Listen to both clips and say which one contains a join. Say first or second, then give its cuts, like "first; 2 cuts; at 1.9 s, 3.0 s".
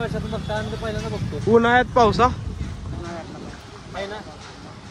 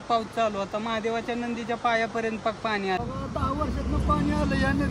second; 1 cut; at 3.0 s